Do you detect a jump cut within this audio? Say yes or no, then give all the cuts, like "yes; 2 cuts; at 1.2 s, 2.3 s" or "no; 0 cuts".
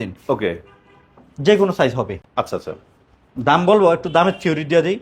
no; 0 cuts